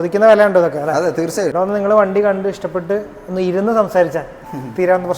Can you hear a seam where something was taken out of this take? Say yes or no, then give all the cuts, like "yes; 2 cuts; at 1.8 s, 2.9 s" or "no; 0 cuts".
yes; 1 cut; at 1.5 s